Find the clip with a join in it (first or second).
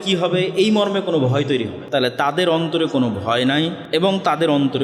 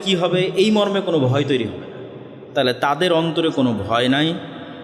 first